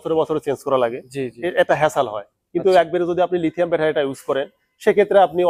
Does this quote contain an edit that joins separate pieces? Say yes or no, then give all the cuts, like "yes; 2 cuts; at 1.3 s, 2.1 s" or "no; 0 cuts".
no; 0 cuts